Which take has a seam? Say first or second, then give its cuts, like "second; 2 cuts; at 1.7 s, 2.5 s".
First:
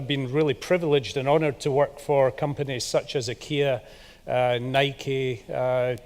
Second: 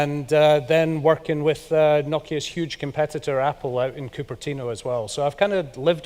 first; 1 cut; at 1.5 s